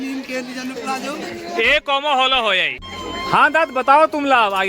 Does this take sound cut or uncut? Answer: cut